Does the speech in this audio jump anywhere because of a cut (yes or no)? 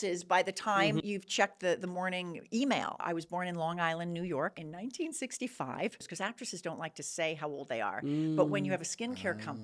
yes